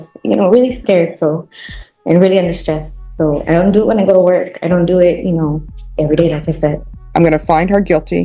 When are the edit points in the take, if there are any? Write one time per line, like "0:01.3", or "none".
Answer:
0:06.9